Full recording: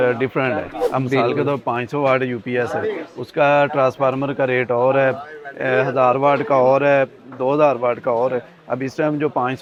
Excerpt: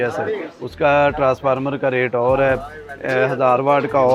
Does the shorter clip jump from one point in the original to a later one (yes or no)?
no